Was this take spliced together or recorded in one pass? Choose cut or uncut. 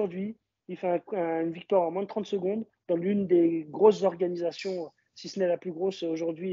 uncut